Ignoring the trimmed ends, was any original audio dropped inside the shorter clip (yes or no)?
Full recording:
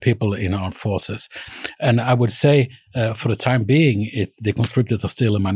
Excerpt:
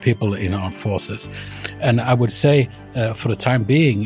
no